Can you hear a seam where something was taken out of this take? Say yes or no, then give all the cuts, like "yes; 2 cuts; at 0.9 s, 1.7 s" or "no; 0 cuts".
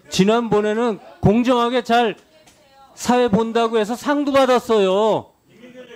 no; 0 cuts